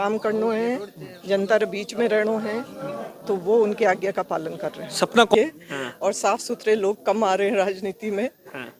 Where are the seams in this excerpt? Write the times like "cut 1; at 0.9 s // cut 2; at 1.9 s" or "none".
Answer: cut 1; at 5.3 s